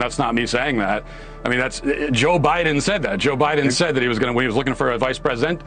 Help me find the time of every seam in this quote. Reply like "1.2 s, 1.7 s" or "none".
1.1 s

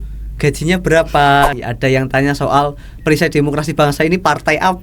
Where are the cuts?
1.6 s

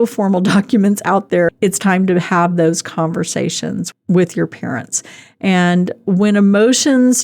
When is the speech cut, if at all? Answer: 1.5 s, 3.9 s

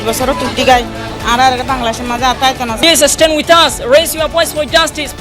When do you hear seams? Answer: 2.8 s

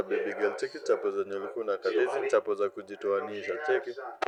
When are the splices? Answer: none

